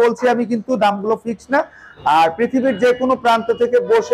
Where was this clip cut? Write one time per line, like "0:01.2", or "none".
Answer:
0:01.8